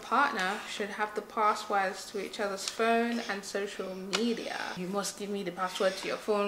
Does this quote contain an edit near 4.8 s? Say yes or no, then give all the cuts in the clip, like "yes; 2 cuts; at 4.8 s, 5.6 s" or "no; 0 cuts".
yes; 1 cut; at 4.8 s